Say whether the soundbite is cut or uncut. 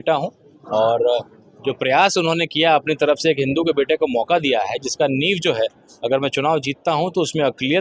uncut